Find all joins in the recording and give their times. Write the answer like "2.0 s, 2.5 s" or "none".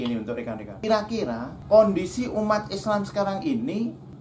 0.8 s, 1.5 s

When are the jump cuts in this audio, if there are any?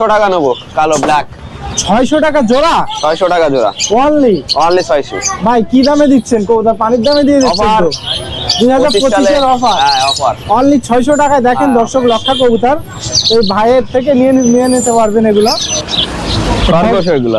none

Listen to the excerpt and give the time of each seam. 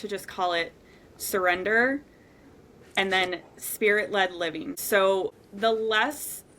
4.8 s, 5.3 s

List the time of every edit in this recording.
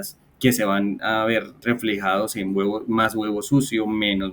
1.6 s

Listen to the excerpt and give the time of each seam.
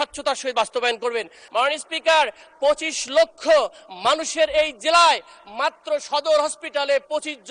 1.4 s

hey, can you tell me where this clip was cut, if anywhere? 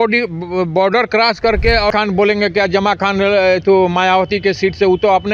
1.9 s

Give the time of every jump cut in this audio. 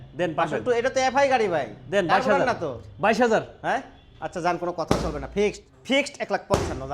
5.7 s

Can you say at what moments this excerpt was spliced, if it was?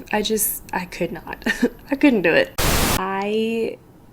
2.8 s

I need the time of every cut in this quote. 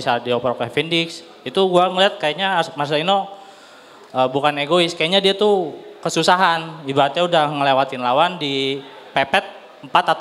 none

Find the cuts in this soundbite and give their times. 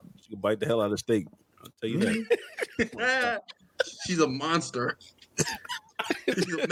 none

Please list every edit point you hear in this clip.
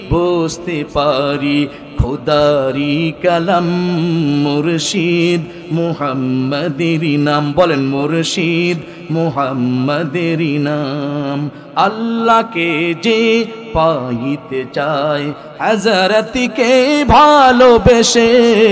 none

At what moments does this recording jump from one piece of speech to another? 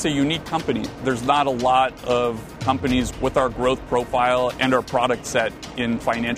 1.0 s, 3.1 s, 4.6 s

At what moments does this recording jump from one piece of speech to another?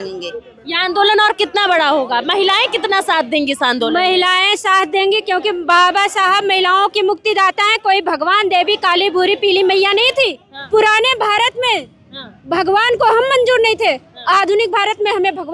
10.5 s

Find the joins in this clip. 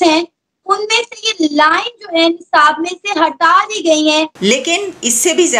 4.3 s

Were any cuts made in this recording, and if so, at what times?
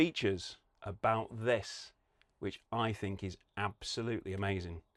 none

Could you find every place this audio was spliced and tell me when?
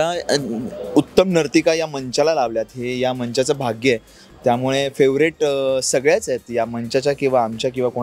none

